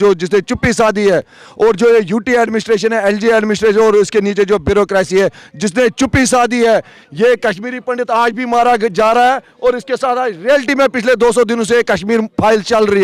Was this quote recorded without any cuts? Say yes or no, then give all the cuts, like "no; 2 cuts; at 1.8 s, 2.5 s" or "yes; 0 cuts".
yes; 0 cuts